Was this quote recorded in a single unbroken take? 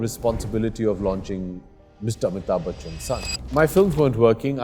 no; 1 cut; at 3.4 s

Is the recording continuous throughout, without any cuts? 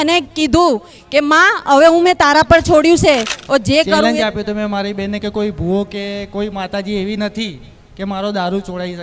no; 1 cut; at 4.0 s

